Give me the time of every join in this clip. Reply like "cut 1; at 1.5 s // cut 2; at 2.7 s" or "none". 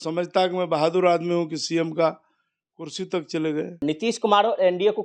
cut 1; at 3.8 s